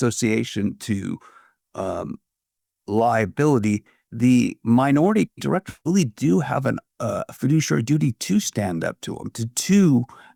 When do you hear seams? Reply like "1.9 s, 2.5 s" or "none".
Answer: none

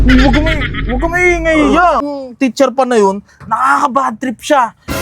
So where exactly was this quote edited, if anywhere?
2.0 s

